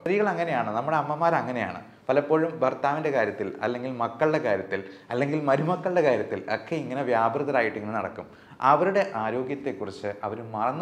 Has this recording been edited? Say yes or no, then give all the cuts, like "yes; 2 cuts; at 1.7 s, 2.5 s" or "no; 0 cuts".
no; 0 cuts